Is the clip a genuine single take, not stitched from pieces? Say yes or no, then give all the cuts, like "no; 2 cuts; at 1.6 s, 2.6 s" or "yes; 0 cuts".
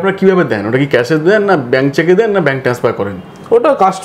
yes; 0 cuts